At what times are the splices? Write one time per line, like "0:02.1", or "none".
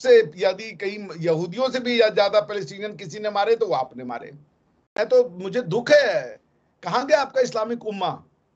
0:04.9

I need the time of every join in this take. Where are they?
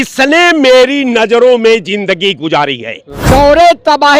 0:03.1

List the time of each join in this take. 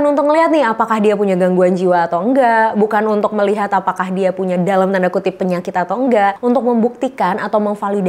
0:06.4

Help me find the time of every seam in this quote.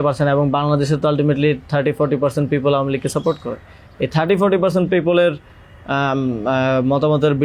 none

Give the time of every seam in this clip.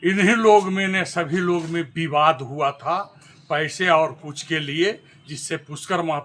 none

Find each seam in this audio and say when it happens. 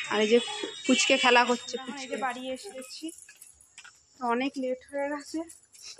0:01.9

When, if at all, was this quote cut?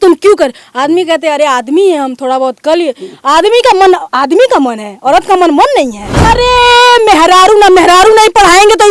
0:06.2

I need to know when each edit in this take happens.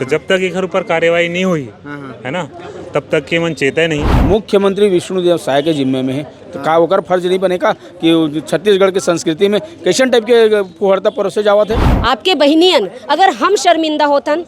0:04.1
0:11.9

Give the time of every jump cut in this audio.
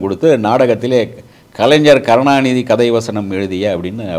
none

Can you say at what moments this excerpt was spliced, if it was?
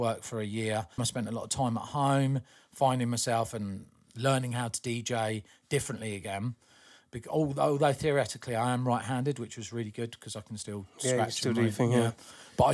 0:01.1

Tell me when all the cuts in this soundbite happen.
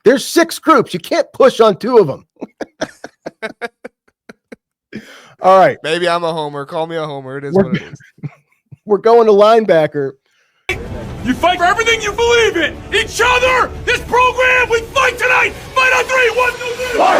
0:10.8

